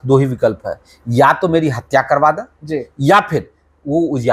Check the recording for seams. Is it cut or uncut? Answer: uncut